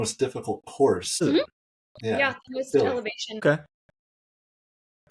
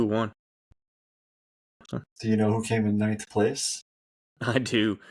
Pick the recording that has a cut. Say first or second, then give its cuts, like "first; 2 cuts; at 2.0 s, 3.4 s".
first; 2 cuts; at 1.2 s, 3.4 s